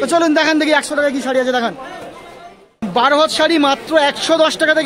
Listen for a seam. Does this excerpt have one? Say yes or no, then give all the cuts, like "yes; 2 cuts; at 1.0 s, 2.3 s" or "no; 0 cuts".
yes; 1 cut; at 2.8 s